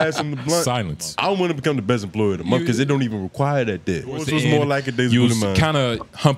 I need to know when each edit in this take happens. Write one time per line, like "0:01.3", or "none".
0:01.0
0:04.2

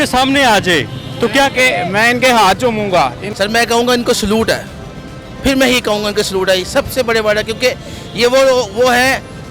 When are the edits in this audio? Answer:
0:03.3

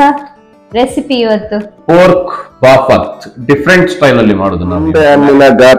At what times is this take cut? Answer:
0:04.9

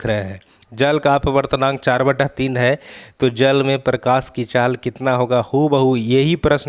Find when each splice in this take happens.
none

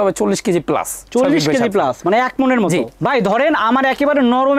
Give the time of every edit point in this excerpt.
0:02.9

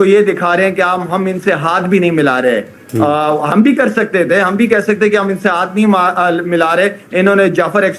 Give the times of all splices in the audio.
none

